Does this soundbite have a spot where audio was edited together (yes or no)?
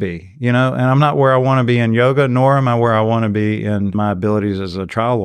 yes